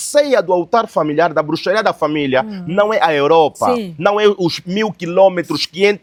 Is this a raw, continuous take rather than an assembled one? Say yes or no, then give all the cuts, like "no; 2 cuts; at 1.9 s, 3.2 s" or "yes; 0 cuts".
yes; 0 cuts